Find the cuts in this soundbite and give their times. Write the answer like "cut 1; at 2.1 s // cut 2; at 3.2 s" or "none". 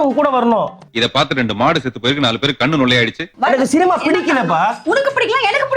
cut 1; at 3.3 s